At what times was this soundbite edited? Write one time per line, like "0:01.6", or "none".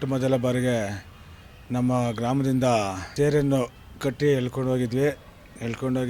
0:03.0